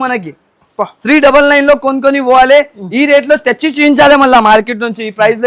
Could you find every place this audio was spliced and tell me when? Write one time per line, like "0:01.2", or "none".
none